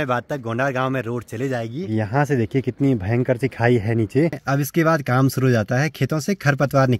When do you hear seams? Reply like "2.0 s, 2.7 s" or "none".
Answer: 1.9 s, 4.4 s